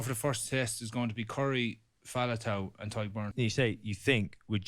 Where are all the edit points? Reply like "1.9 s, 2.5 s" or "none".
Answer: 3.3 s